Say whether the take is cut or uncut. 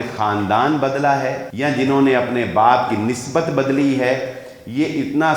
cut